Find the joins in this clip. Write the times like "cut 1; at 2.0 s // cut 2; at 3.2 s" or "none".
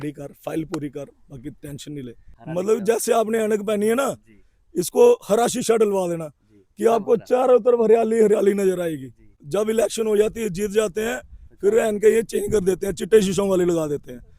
cut 1; at 2.3 s // cut 2; at 9.4 s